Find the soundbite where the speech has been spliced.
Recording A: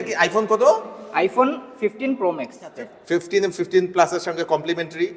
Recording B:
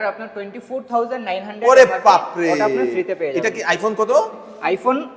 A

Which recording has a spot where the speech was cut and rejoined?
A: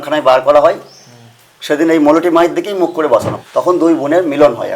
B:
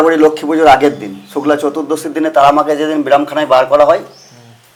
A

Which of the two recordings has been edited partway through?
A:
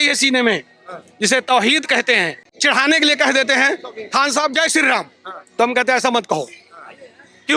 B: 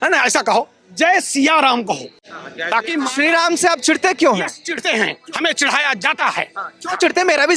A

